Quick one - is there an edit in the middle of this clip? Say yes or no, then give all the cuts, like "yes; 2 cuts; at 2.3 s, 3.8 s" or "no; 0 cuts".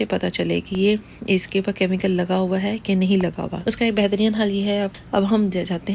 yes; 2 cuts; at 3.5 s, 4.9 s